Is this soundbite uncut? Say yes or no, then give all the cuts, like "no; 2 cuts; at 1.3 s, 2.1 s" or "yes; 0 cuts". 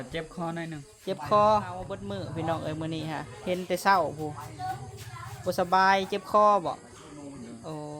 no; 1 cut; at 2.0 s